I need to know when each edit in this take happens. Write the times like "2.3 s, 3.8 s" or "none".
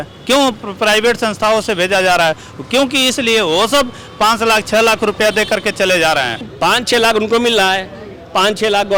6.5 s